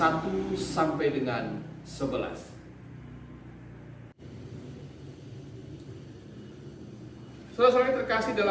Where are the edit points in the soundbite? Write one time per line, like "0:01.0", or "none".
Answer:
0:04.2